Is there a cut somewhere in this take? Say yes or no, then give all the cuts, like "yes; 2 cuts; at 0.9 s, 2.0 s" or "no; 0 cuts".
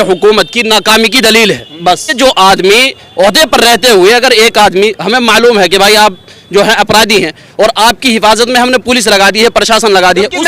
yes; 1 cut; at 2.1 s